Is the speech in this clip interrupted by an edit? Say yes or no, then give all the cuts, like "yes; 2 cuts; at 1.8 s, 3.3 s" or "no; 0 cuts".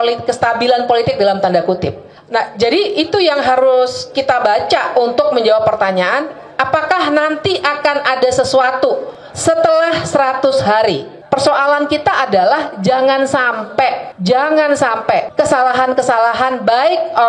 yes; 2 cuts; at 11.2 s, 15.3 s